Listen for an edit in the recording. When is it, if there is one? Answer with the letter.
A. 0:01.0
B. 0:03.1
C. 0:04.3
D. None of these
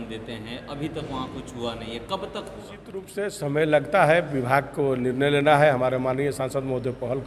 B